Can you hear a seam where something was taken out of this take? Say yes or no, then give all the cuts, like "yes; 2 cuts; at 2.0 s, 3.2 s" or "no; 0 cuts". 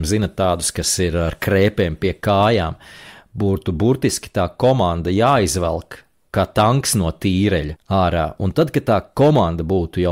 yes; 2 cuts; at 6.2 s, 7.8 s